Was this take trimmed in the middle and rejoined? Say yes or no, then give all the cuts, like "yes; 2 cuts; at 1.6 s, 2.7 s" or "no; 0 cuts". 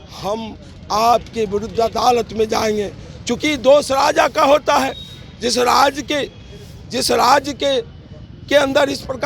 no; 0 cuts